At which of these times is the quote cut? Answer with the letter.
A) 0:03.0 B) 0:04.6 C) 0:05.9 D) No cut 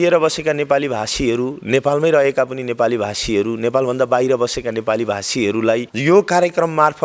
C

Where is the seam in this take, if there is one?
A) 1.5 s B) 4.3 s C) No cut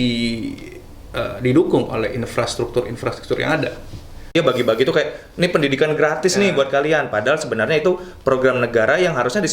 B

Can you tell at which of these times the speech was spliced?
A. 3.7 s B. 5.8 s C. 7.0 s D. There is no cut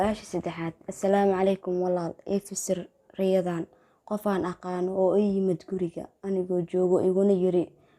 D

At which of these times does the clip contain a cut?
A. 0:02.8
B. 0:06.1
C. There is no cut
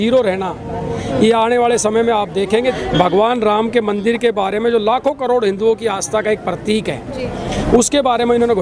A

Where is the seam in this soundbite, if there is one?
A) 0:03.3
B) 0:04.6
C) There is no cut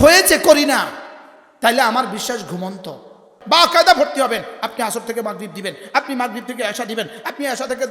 A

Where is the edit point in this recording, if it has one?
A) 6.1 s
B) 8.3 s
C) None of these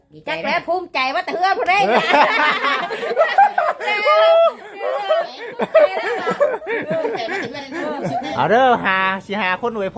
B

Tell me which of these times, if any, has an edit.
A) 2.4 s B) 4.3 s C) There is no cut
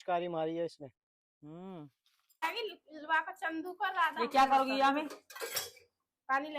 A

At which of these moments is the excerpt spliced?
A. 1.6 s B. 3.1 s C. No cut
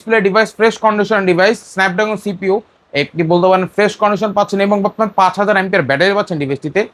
C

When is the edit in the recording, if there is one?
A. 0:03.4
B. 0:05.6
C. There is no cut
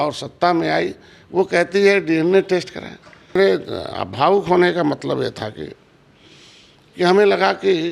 A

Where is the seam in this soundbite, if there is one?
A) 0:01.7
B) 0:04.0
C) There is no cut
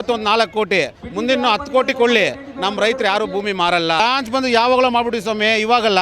B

